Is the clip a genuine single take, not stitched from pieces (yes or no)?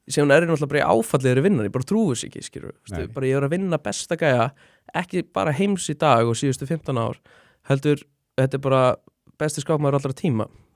yes